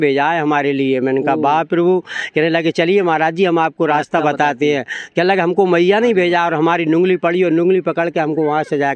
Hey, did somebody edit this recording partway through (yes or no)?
no